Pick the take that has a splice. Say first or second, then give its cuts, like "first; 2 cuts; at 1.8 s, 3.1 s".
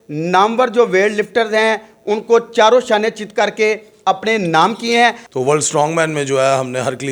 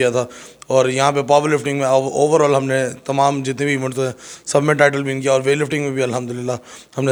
first; 1 cut; at 5.2 s